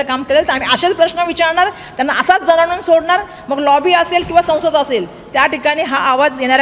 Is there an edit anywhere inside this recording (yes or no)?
no